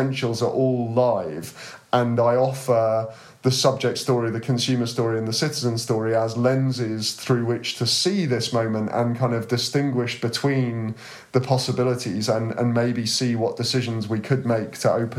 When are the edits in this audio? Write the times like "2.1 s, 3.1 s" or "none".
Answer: none